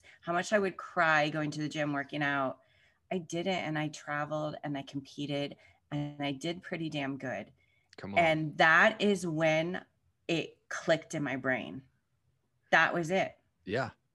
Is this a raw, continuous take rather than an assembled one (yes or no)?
yes